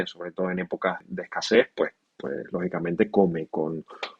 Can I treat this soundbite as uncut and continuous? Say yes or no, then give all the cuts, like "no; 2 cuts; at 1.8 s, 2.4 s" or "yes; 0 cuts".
no; 1 cut; at 1.0 s